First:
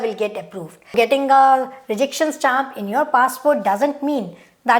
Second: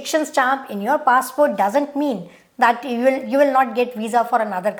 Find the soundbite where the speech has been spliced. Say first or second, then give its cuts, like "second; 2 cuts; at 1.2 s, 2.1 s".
first; 1 cut; at 0.9 s